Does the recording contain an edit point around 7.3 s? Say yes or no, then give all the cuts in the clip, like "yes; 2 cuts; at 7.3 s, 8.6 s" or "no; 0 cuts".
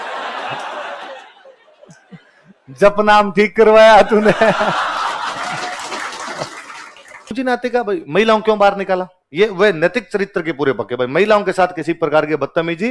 yes; 1 cut; at 7.3 s